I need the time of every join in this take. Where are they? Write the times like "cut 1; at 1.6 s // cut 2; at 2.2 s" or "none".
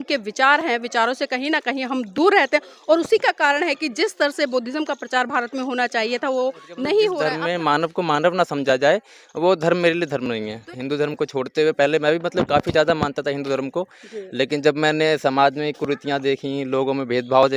cut 1; at 7.3 s // cut 2; at 10.6 s